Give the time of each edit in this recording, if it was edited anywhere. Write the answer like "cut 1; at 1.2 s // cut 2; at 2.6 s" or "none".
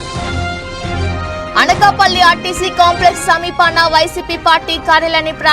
cut 1; at 1.2 s